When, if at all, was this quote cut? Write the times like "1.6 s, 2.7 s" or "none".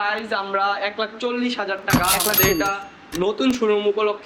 none